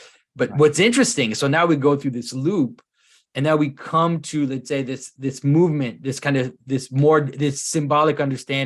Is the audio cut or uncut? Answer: uncut